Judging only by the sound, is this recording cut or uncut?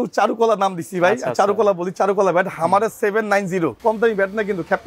cut